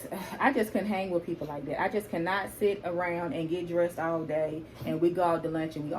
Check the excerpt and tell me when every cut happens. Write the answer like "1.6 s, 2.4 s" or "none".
none